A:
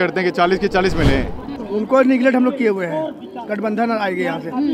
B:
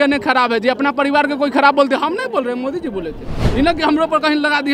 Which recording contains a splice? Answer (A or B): A